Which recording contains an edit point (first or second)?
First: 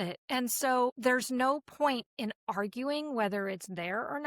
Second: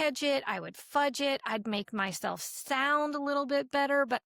first